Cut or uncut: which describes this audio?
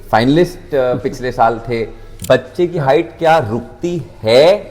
cut